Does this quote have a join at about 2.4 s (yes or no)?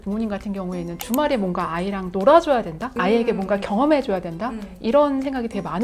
no